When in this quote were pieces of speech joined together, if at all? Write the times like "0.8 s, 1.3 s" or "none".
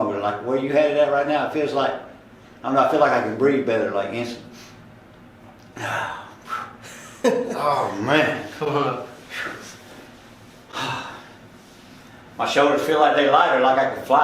none